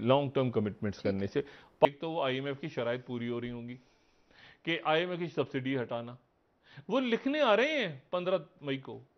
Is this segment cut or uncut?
cut